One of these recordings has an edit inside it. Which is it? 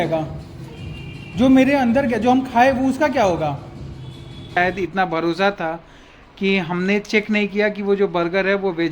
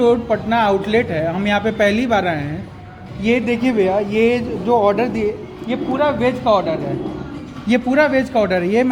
first; 1 cut; at 4.6 s

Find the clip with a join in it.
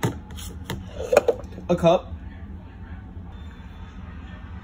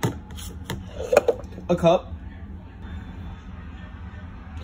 second; 1 cut; at 3.2 s

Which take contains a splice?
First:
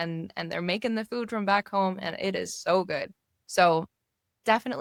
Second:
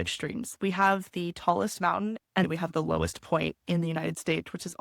second; 1 cut; at 2.4 s

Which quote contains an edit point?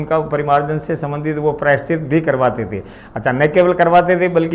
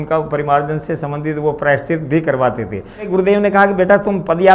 second; 1 cut; at 3.1 s

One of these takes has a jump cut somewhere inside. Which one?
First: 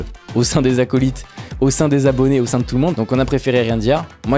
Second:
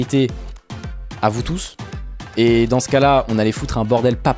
first; 1 cut; at 2.9 s

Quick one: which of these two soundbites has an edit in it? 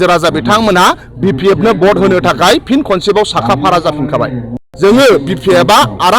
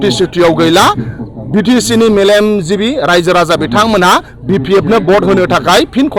first; 1 cut; at 4.6 s

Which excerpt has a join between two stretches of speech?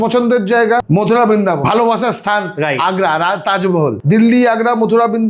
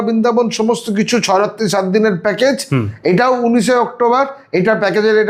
first; 3 cuts; at 0.8 s, 1.6 s, 4.0 s

